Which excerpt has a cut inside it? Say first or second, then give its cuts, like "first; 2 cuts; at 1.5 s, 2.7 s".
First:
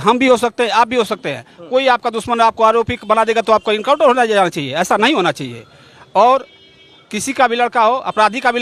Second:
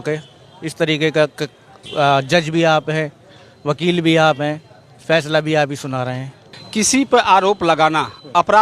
second; 1 cut; at 6.6 s